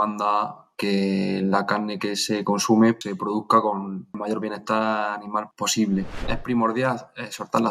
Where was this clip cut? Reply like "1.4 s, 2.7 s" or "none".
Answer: 3.0 s, 4.2 s, 5.5 s, 6.3 s